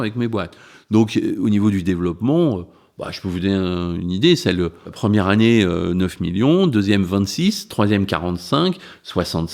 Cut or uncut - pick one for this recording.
cut